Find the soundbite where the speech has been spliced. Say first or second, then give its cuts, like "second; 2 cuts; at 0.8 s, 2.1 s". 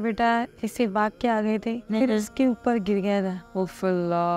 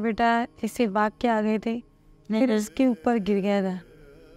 first; 2 cuts; at 1.8 s, 3.4 s